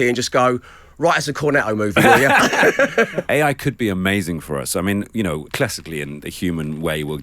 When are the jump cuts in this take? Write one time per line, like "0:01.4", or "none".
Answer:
0:03.2
0:05.5